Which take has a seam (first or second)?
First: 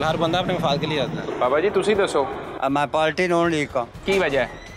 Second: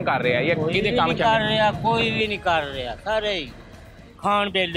first